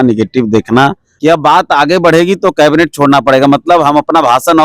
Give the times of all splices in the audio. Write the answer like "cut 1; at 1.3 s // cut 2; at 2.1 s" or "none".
cut 1; at 1.1 s